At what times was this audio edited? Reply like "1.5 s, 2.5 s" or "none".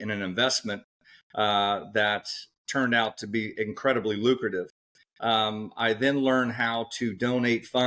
none